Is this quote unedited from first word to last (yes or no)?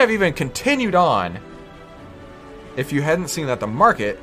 yes